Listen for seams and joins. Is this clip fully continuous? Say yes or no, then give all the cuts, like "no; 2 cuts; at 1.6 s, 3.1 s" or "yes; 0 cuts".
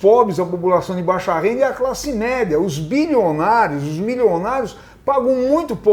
yes; 0 cuts